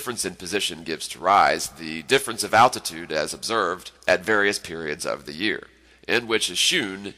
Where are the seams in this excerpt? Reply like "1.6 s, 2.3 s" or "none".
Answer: 5.3 s